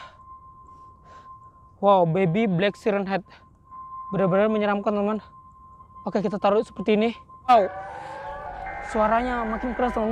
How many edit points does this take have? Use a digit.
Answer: 1